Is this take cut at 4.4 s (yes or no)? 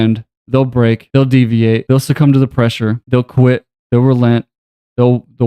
no